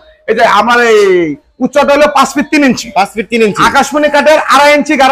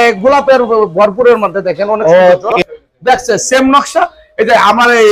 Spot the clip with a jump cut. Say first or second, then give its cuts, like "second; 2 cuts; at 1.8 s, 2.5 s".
second; 1 cut; at 2.6 s